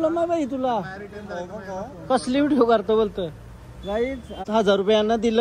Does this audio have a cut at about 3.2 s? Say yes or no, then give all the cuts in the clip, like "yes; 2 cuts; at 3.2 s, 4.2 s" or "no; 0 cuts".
no; 1 cut; at 4.4 s